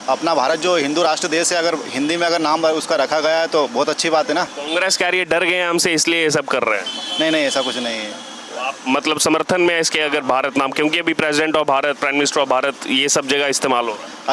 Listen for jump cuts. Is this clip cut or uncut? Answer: uncut